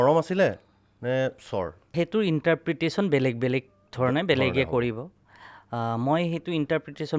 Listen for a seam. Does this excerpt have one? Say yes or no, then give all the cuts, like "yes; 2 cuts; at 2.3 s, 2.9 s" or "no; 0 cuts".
yes; 1 cut; at 1.9 s